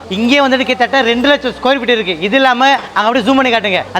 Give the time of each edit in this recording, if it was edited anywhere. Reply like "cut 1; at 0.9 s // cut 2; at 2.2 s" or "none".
none